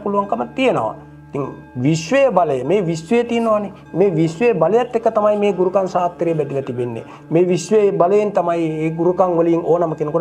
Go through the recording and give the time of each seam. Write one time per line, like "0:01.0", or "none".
none